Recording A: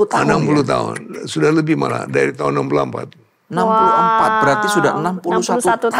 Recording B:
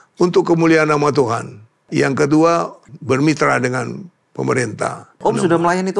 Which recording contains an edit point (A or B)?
B